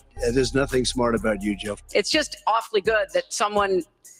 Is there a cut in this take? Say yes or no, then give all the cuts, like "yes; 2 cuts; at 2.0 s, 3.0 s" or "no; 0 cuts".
no; 0 cuts